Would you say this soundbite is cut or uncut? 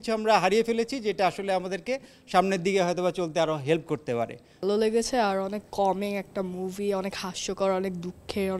cut